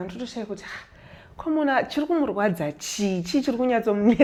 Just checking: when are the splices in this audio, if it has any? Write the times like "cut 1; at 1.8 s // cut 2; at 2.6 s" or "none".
none